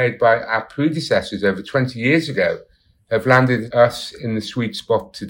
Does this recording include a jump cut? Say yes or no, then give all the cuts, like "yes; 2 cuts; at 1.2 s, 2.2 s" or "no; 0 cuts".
yes; 1 cut; at 3.7 s